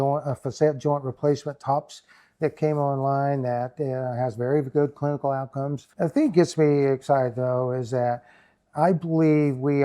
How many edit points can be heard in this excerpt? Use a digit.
1